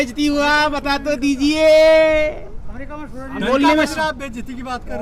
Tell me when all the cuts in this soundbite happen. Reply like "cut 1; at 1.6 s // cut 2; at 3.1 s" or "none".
none